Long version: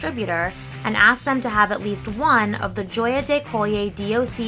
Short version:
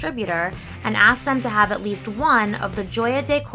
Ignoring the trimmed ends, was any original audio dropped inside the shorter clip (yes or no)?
no